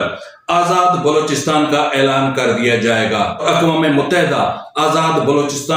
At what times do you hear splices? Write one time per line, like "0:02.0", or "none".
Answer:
0:03.4